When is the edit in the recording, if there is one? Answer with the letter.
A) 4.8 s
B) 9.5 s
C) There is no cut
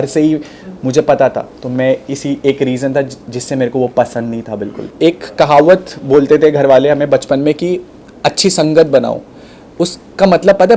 A